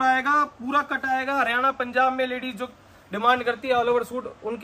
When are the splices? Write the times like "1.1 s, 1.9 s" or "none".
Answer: none